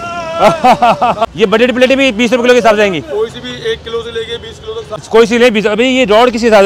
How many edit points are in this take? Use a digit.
2